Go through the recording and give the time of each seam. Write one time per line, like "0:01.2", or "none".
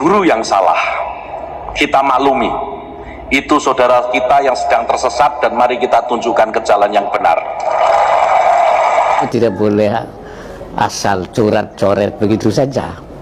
0:09.2